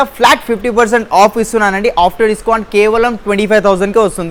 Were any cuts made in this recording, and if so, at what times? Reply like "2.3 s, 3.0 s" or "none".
none